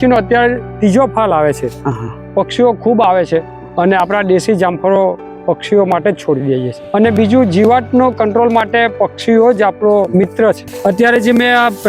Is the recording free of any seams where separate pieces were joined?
no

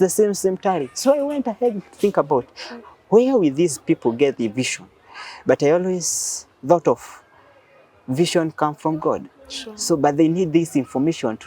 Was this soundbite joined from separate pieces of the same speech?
no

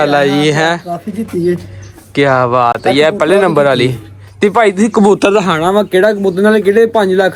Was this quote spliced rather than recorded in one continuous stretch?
no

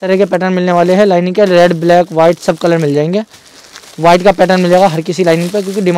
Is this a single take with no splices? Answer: yes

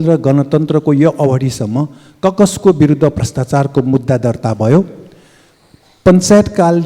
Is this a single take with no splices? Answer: yes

